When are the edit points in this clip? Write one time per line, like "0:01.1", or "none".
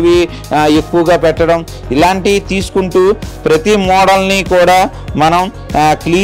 none